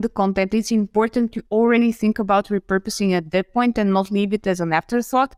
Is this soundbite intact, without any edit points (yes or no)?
yes